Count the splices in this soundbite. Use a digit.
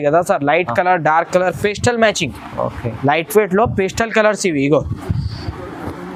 0